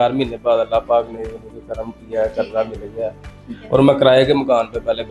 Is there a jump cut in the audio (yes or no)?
no